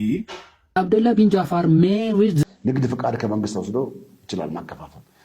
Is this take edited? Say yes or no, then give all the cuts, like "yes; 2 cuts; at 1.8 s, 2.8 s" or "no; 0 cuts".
yes; 1 cut; at 2.4 s